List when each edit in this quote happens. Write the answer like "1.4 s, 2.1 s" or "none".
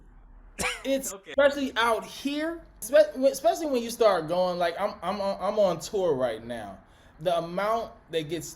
1.2 s, 2.8 s, 7.1 s